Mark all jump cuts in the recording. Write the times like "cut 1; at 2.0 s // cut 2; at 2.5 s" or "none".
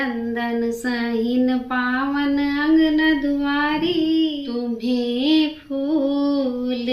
cut 1; at 4.4 s